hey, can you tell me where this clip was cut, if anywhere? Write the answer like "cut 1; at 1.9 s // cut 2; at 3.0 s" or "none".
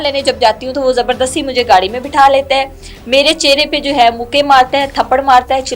none